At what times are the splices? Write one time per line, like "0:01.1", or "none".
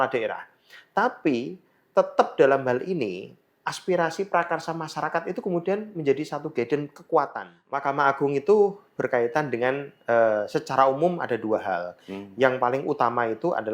0:07.8